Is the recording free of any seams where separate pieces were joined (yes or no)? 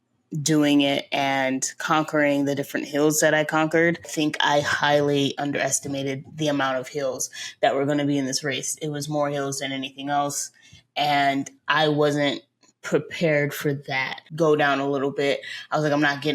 no